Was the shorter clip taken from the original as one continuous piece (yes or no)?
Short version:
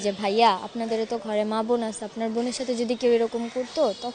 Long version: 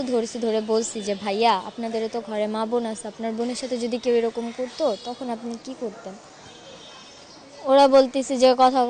yes